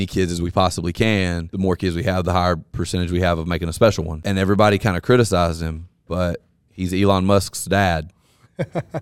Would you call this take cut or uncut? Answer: cut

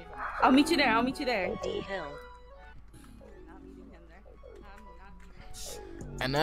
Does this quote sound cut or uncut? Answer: uncut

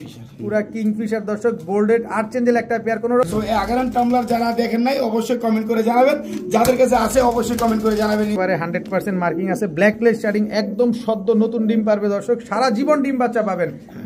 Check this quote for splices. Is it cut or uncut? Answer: cut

